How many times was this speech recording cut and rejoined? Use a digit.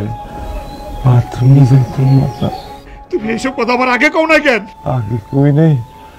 0